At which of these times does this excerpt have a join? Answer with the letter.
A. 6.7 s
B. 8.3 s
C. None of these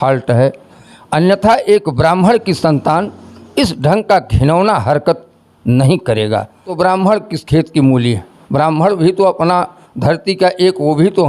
A